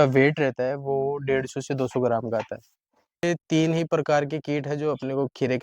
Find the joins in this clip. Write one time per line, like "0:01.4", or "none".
0:03.2